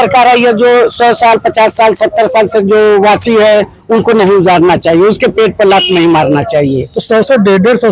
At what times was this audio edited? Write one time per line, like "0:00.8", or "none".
none